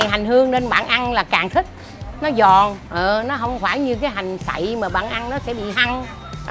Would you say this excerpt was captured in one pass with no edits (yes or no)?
yes